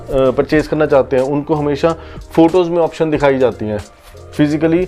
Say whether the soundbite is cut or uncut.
uncut